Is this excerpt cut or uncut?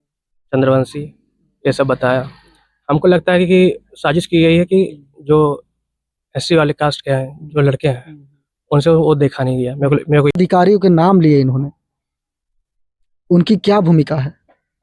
cut